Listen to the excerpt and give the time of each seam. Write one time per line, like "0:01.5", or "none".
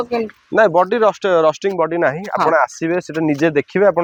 none